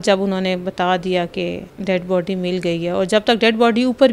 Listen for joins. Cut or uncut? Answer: cut